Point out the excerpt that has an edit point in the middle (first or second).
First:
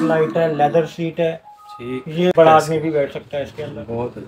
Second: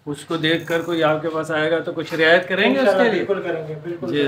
first